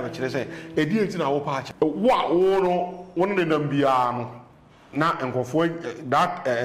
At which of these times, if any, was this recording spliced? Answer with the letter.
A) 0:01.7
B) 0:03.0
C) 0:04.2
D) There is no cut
A